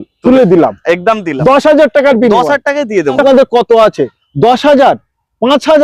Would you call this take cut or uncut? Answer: cut